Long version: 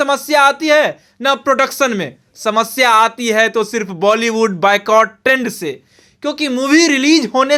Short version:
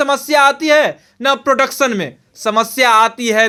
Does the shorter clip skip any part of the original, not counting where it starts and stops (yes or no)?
no